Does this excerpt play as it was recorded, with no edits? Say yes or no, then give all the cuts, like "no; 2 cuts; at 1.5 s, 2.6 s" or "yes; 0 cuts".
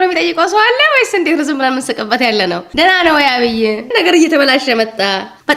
yes; 0 cuts